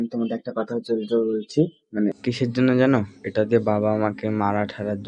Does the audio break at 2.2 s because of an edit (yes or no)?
yes